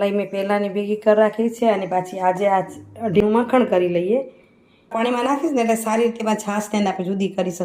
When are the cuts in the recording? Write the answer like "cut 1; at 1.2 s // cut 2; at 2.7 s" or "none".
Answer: cut 1; at 3.2 s // cut 2; at 4.9 s

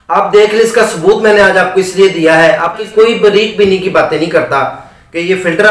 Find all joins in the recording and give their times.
cut 1; at 2.8 s

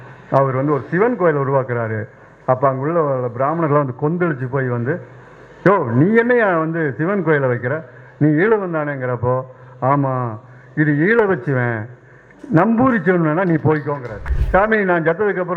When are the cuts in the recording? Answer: cut 1; at 14.3 s

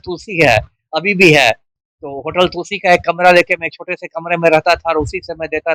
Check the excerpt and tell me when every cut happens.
none

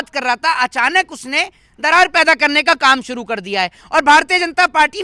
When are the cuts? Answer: none

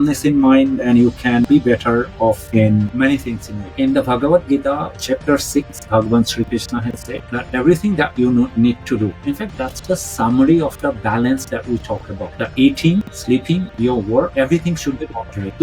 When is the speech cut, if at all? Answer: cut 1; at 3.7 s // cut 2; at 5.0 s // cut 3; at 12.3 s

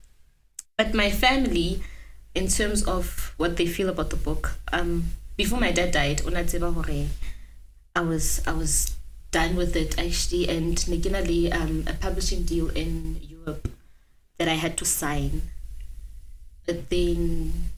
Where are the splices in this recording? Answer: none

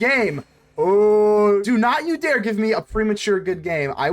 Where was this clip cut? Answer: cut 1; at 1.6 s

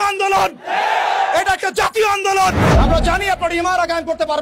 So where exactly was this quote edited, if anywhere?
cut 1; at 2.6 s

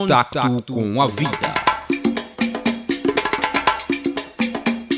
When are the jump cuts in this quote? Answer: cut 1; at 1.1 s

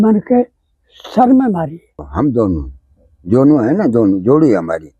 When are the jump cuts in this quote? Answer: cut 1; at 2.0 s

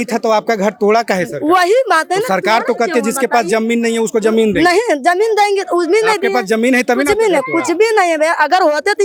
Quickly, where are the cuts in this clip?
none

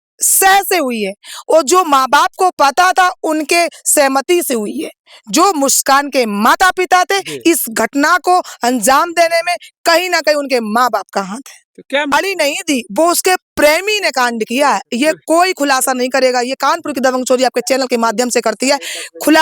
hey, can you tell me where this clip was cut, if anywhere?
cut 1; at 12.1 s

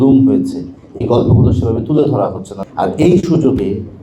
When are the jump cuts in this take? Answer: cut 1; at 2.5 s

